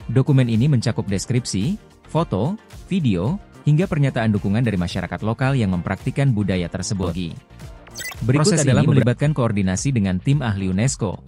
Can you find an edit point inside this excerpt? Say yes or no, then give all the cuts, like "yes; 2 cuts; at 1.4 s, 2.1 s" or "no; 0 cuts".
yes; 1 cut; at 8.7 s